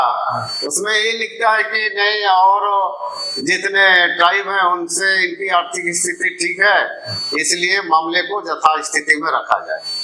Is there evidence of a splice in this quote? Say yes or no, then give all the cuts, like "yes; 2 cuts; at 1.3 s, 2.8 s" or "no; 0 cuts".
no; 0 cuts